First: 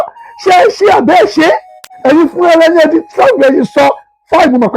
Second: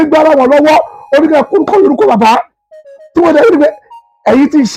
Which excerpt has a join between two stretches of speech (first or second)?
first